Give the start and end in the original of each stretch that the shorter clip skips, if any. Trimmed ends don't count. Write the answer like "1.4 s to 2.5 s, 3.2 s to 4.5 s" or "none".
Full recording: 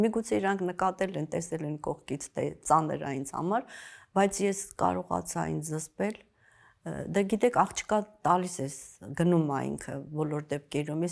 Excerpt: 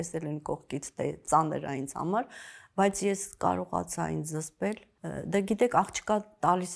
6.3 s to 6.8 s